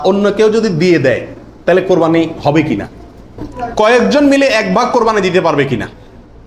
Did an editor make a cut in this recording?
yes; 1 cut; at 3.4 s

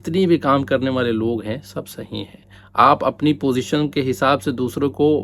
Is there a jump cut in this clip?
no; 0 cuts

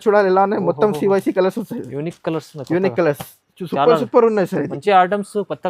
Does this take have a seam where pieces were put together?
no; 0 cuts

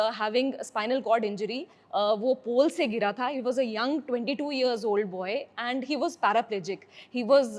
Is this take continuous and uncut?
yes; 0 cuts

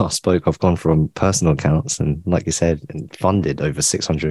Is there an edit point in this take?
no; 0 cuts

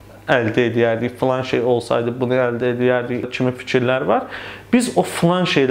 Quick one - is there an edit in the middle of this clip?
yes; 1 cut; at 3.3 s

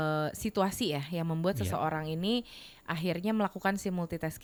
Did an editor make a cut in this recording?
no; 0 cuts

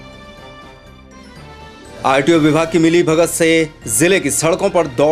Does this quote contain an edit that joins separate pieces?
no; 0 cuts

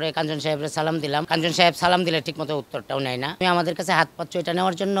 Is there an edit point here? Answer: yes; 2 cuts; at 1.2 s, 3.4 s

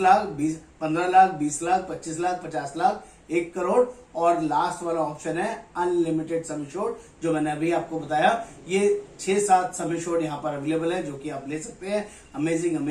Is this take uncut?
yes; 0 cuts

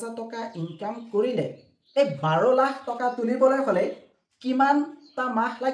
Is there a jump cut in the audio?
no; 0 cuts

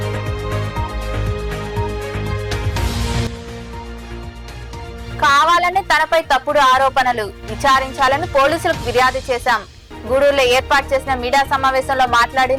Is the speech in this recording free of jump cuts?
yes; 0 cuts

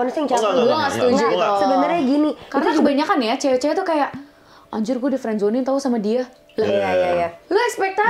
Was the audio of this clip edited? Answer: yes; 1 cut; at 2.8 s

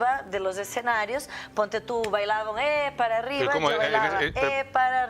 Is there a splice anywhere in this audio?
no; 0 cuts

